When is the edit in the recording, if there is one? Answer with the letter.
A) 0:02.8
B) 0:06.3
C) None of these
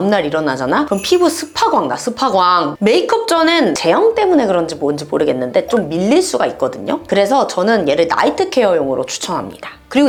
C